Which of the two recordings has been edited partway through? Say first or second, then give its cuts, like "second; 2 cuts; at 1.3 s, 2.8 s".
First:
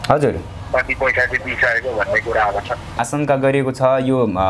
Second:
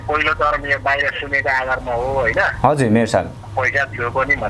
first; 1 cut; at 3.0 s